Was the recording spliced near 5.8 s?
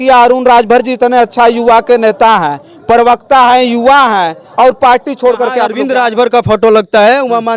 yes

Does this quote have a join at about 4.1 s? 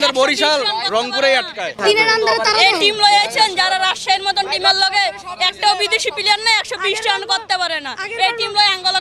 no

